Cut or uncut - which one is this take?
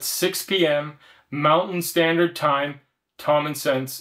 uncut